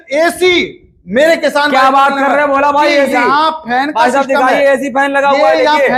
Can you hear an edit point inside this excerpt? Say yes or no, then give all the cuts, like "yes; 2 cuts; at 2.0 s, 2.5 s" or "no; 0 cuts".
no; 0 cuts